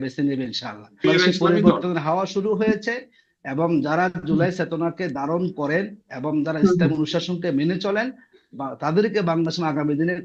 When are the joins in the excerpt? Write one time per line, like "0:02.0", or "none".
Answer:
0:01.0